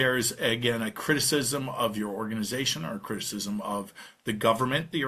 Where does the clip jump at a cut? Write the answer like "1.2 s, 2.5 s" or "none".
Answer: none